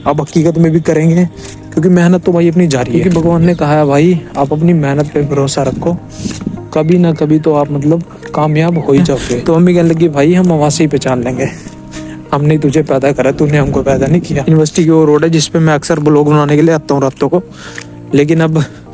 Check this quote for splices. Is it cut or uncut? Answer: cut